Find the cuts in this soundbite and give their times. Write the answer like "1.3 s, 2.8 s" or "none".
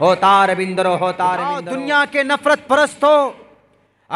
1.4 s